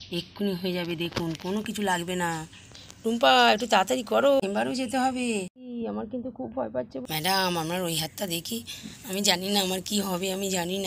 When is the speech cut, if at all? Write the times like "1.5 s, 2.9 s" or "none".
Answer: 4.4 s, 5.6 s, 7.0 s